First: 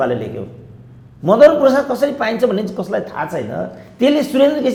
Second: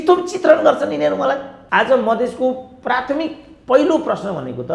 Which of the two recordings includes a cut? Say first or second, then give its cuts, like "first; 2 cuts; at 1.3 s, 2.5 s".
second; 1 cut; at 1.5 s